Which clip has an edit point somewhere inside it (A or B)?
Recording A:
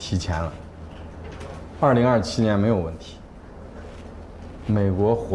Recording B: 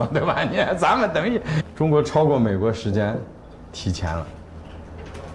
B